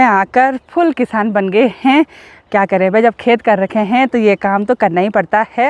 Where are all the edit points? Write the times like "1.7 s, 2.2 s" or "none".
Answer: none